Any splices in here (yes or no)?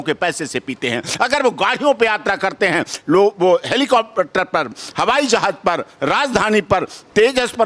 no